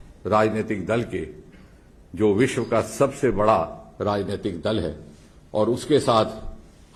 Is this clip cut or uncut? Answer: uncut